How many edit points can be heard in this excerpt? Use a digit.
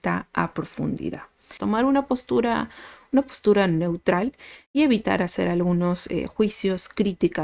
1